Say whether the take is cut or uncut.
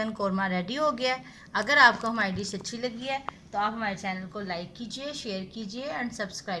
uncut